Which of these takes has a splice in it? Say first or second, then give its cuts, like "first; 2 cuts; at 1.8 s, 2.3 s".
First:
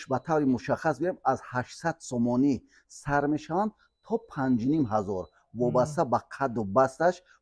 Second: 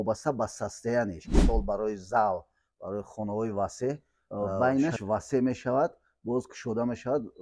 second; 2 cuts; at 1.4 s, 4.2 s